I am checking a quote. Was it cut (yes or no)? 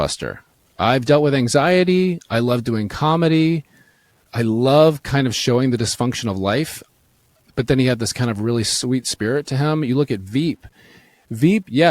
yes